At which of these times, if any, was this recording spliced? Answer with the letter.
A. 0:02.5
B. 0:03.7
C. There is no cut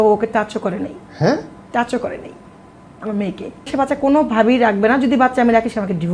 B